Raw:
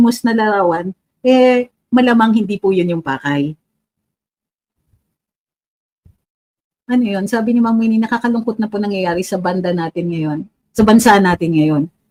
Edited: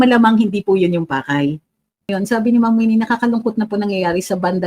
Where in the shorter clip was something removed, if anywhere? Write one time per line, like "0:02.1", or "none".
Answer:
0:02.1